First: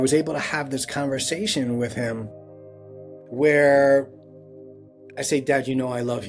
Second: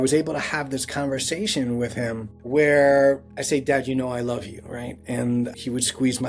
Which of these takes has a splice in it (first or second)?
second